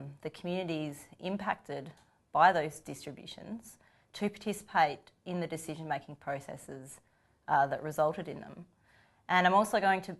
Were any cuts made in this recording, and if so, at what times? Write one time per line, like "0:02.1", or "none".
0:03.4